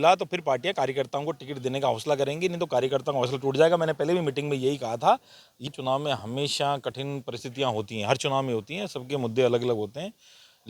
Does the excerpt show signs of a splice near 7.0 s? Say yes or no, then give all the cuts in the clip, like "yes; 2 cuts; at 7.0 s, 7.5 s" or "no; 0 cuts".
no; 1 cut; at 5.7 s